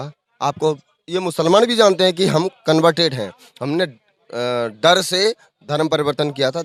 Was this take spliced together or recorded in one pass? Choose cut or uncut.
uncut